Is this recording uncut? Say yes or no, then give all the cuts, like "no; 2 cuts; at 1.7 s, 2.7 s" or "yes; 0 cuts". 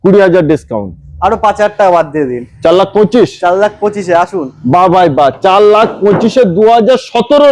yes; 0 cuts